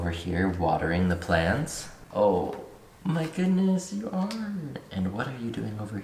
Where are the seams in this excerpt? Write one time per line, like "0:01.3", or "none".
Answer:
none